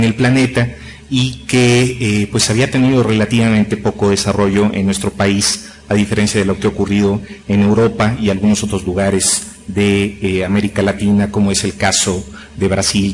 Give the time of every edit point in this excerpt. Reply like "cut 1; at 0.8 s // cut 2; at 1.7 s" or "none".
cut 1; at 6.9 s